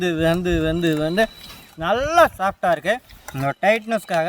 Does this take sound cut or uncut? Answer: uncut